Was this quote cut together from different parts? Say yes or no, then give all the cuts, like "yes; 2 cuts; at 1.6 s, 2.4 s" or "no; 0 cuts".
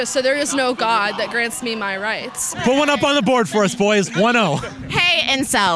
yes; 1 cut; at 2.4 s